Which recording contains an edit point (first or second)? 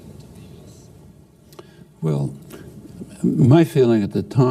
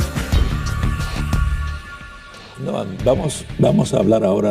second